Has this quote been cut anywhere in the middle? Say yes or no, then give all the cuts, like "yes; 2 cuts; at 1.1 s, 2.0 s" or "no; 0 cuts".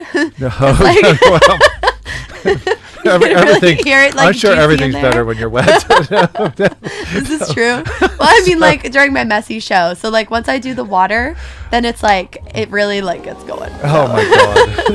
no; 0 cuts